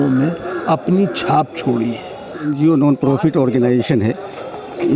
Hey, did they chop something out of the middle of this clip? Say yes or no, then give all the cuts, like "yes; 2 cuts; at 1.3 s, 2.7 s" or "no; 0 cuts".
yes; 1 cut; at 2.5 s